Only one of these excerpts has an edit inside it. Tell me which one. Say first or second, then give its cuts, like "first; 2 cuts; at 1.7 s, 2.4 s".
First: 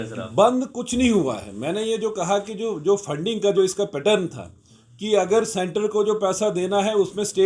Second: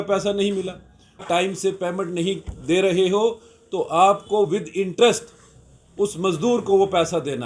second; 1 cut; at 1.2 s